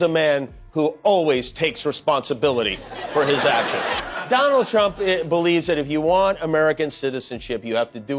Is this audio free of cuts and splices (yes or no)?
no